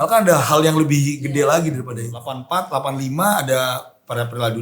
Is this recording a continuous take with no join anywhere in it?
no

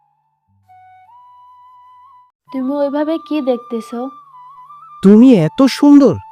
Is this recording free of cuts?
no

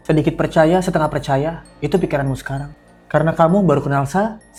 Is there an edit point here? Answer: no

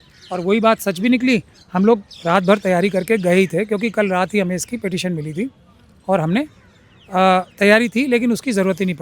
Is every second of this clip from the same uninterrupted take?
yes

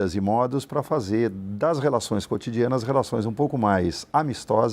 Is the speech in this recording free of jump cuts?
yes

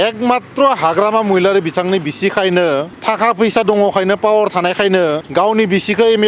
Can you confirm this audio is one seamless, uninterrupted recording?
no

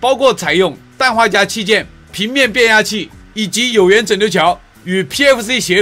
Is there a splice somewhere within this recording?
no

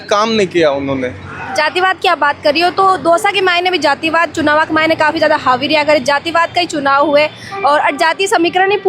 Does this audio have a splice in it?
no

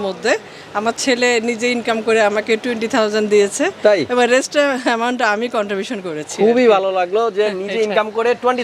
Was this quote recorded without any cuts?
yes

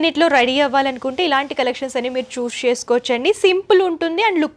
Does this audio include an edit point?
no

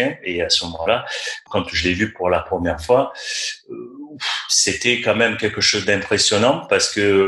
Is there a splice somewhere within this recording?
no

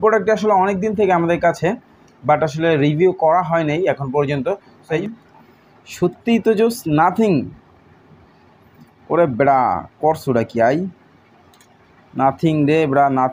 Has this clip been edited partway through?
yes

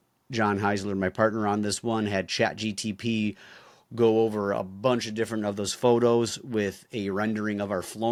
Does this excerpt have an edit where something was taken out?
no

